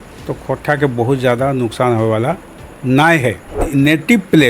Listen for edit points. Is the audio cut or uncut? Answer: cut